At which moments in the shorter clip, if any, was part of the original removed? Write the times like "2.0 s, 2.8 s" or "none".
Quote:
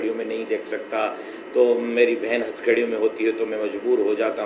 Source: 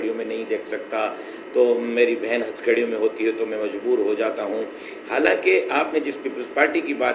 none